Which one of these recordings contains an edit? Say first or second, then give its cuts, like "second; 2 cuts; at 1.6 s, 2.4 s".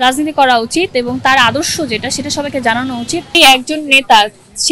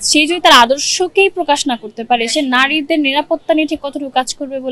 first; 1 cut; at 3.3 s